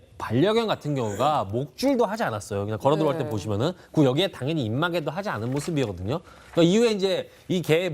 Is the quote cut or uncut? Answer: cut